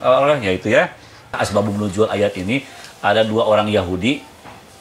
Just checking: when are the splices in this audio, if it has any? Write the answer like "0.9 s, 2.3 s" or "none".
1.3 s